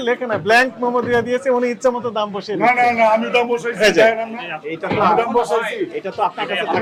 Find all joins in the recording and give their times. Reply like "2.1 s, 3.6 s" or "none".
none